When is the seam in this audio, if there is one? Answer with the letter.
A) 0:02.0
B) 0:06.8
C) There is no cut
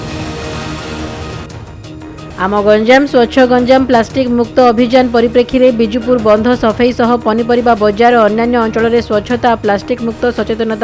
A